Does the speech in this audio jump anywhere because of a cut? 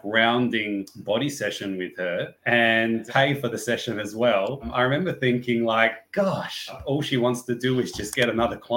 yes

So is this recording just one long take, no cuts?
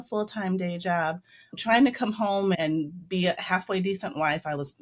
no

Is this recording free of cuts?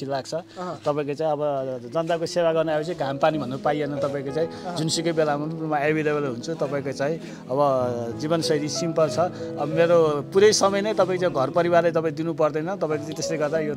yes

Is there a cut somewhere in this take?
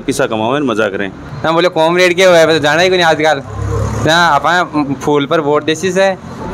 yes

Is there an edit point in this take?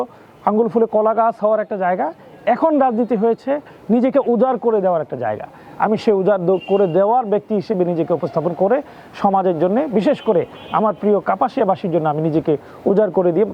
no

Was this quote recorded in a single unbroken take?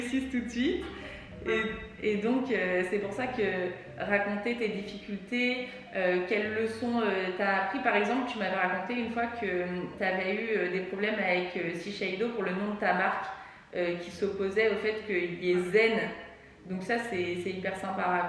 yes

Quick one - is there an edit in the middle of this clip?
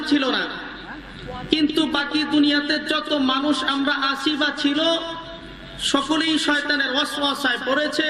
no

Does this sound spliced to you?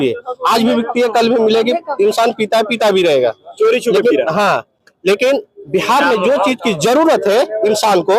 no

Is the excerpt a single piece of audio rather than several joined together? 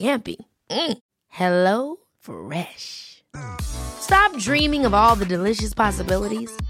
yes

